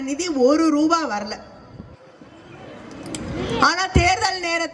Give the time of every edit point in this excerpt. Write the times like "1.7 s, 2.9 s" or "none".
none